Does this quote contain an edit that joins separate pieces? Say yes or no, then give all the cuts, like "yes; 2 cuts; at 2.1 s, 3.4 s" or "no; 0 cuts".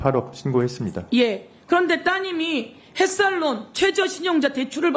no; 0 cuts